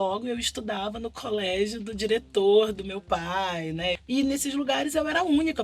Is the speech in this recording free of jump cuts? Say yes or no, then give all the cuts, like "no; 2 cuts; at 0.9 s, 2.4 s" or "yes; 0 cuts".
no; 1 cut; at 4.0 s